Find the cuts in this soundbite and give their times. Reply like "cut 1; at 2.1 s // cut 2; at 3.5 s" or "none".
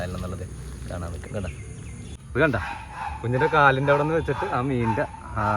cut 1; at 2.1 s